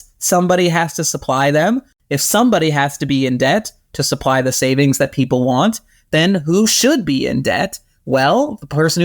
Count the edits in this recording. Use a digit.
1